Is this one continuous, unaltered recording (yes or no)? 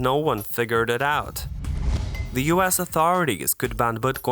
no